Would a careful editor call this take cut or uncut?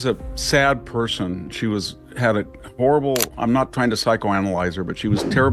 uncut